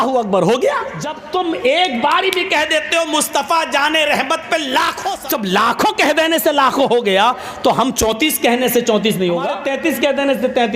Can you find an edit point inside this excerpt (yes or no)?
yes